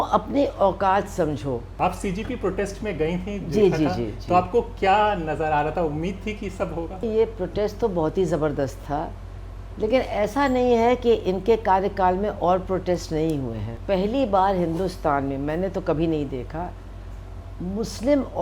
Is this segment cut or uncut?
cut